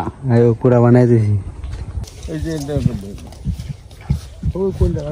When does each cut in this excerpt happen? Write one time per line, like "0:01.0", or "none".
0:02.1